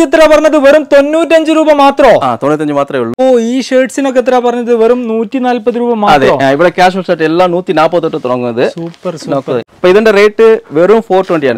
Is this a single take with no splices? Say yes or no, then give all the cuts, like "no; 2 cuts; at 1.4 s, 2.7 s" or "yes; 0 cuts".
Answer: no; 2 cuts; at 3.1 s, 9.7 s